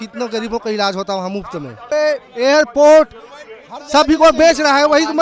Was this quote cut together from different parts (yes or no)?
no